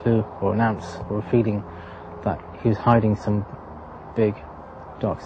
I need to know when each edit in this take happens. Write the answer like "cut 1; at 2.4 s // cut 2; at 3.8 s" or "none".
none